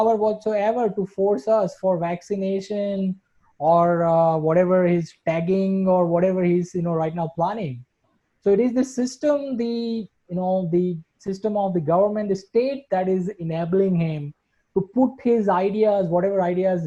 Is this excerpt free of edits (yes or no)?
yes